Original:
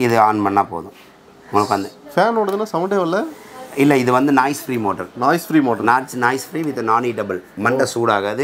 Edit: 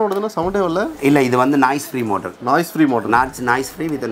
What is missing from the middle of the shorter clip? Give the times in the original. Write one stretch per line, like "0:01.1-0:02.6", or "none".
0:03.3-0:03.7